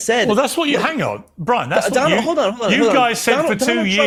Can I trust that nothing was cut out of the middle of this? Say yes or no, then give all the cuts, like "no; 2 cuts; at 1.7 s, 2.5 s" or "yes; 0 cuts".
yes; 0 cuts